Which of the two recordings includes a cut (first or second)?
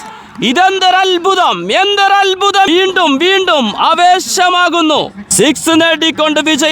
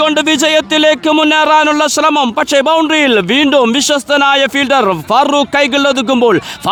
first